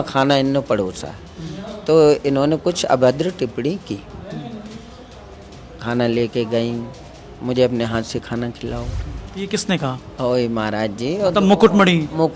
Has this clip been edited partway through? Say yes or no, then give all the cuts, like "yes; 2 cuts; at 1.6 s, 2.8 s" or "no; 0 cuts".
no; 0 cuts